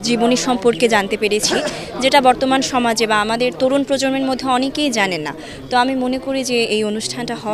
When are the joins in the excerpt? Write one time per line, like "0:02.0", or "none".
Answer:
none